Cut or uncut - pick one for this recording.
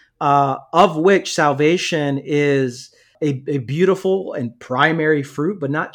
cut